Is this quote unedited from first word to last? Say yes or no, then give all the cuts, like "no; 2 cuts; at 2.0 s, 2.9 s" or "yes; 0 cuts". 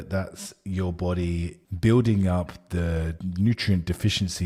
yes; 0 cuts